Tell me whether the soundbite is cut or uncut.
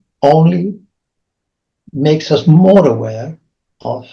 uncut